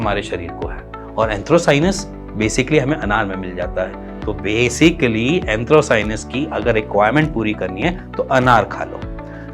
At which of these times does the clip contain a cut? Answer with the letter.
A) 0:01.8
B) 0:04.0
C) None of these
C